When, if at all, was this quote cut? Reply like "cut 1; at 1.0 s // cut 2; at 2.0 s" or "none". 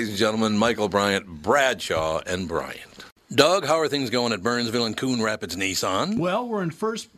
cut 1; at 3.1 s

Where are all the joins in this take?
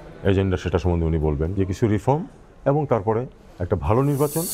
none

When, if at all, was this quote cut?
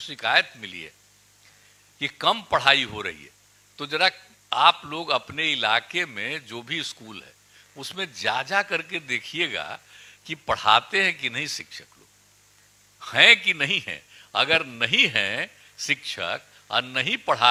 none

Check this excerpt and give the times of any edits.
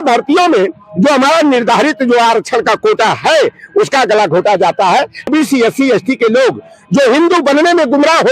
cut 1; at 5.3 s

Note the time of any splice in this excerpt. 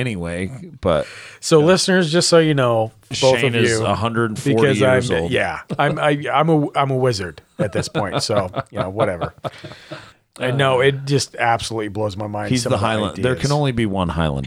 cut 1; at 3.2 s // cut 2; at 5.6 s

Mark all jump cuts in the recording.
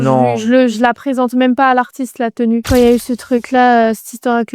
cut 1; at 2.7 s

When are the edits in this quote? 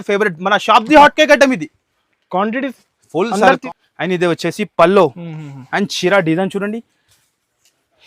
cut 1; at 3.6 s

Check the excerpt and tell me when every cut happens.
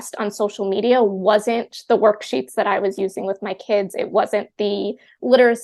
none

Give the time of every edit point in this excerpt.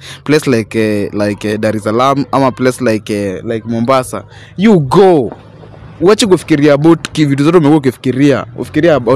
none

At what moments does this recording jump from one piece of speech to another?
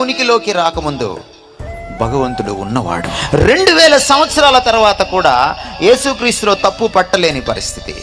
cut 1; at 3.2 s

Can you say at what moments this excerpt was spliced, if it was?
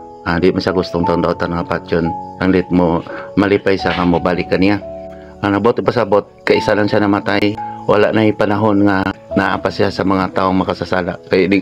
cut 1; at 7.7 s // cut 2; at 9.2 s

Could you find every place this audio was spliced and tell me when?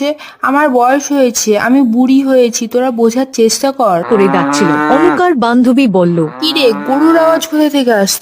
cut 1; at 4.1 s

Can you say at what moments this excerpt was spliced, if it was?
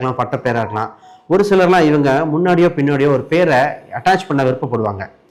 none

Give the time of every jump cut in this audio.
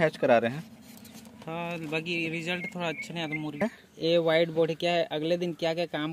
cut 1; at 3.6 s

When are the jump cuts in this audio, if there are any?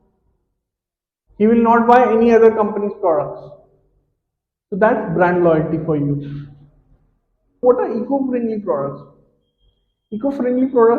cut 1; at 7.5 s

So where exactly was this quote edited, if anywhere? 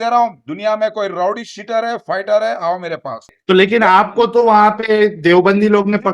cut 1; at 3.3 s

